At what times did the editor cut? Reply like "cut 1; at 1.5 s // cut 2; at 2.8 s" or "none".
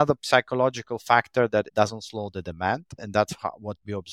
none